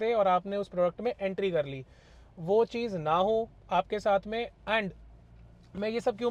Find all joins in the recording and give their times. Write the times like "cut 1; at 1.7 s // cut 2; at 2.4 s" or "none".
none